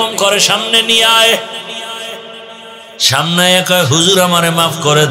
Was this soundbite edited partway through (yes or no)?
no